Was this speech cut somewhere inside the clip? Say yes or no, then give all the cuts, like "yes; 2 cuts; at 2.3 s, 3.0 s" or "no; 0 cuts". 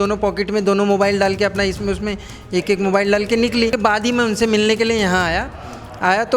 yes; 1 cut; at 3.8 s